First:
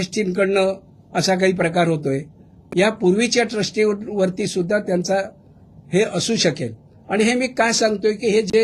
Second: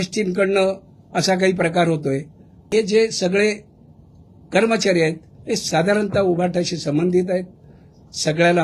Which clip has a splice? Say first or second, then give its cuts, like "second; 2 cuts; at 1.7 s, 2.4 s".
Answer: second; 1 cut; at 2.8 s